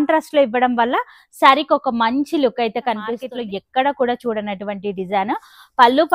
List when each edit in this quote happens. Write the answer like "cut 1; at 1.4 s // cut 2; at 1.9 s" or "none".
cut 1; at 3.2 s